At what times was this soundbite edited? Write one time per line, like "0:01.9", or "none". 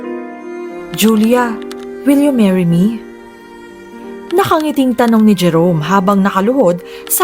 0:00.9